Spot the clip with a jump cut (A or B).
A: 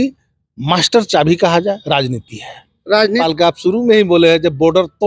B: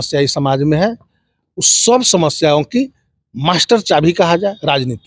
A